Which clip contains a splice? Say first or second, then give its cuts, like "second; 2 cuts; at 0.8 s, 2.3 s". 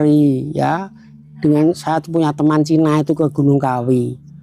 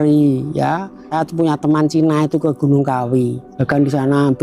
second; 2 cuts; at 1.1 s, 3.5 s